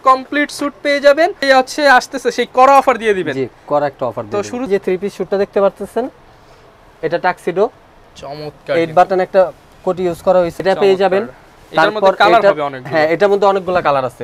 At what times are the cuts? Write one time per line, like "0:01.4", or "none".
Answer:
0:01.4
0:04.7
0:10.6